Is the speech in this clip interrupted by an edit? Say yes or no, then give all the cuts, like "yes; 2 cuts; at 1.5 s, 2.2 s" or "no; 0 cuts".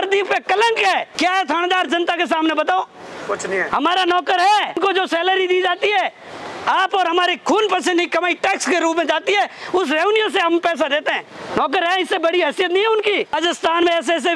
yes; 4 cuts; at 1.1 s, 4.8 s, 11.3 s, 13.3 s